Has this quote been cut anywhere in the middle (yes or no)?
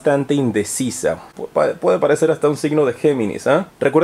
no